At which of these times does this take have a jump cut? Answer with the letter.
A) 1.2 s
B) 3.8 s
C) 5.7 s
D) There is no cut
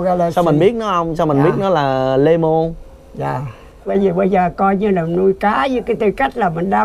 B